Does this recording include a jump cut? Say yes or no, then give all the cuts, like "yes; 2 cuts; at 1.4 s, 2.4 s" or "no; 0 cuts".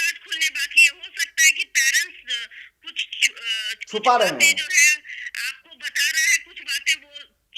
no; 0 cuts